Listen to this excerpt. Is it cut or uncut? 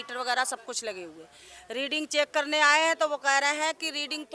uncut